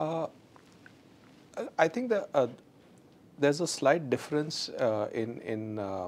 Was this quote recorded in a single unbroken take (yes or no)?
yes